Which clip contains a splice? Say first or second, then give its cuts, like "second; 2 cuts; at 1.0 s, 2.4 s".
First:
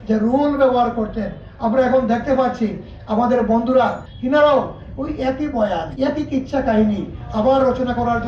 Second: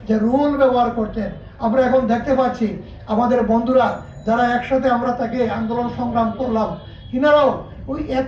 first; 2 cuts; at 4.1 s, 5.9 s